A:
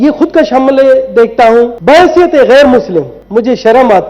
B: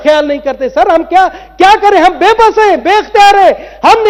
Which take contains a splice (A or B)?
A